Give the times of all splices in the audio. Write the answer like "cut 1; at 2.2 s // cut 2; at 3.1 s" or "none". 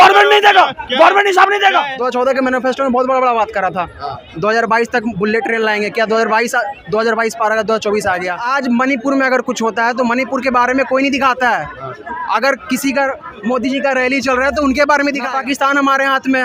cut 1; at 2.0 s // cut 2; at 8.4 s // cut 3; at 15.3 s